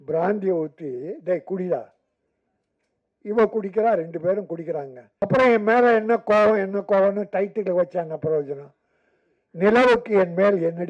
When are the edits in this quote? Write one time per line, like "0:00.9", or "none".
0:05.0